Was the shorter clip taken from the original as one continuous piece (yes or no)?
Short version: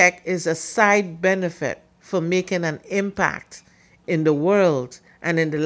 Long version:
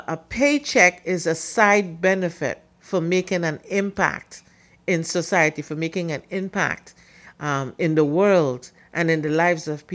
no